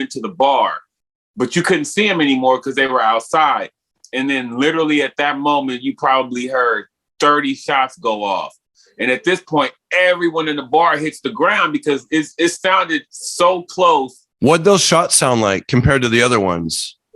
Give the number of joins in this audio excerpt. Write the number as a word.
zero